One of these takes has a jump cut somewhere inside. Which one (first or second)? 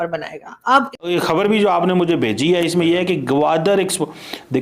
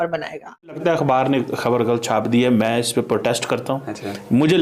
first